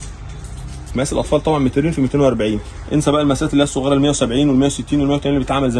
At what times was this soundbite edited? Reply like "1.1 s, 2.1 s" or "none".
0.9 s, 2.7 s

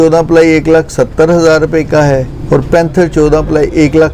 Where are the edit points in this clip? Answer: 2.3 s

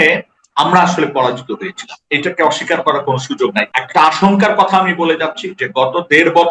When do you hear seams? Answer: 3.7 s

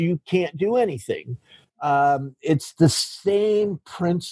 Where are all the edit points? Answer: none

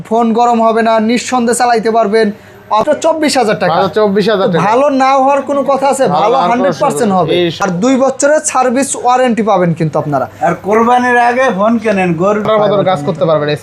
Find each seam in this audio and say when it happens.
2.8 s, 7.6 s, 12.5 s

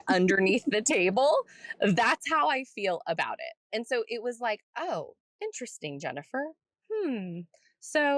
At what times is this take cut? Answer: 3.5 s, 5.2 s

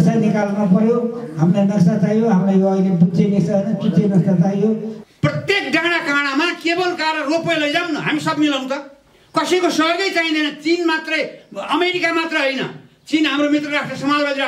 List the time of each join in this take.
4.9 s

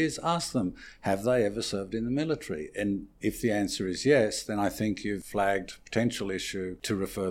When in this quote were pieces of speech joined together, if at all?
5.2 s

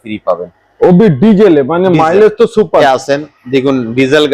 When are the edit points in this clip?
2.8 s

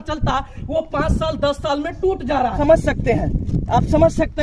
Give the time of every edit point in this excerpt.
2.5 s

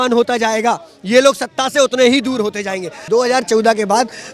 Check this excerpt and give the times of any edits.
2.9 s

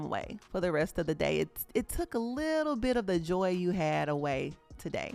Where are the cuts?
none

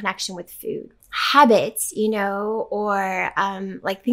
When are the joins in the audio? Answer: 1.0 s

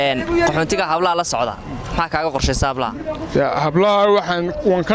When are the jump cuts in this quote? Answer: none

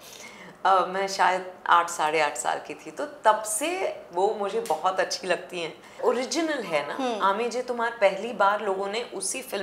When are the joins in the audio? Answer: 6.0 s

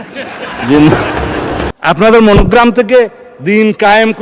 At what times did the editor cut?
1.7 s

